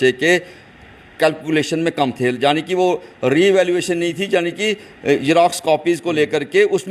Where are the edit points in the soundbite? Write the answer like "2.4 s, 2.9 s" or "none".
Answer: none